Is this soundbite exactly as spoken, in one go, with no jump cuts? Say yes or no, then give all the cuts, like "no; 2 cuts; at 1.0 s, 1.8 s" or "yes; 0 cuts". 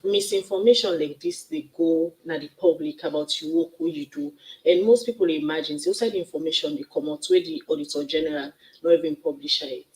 yes; 0 cuts